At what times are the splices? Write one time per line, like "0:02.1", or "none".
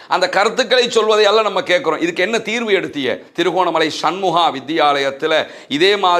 0:03.2